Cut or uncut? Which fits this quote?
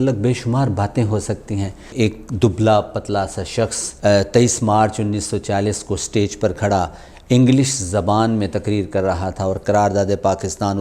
cut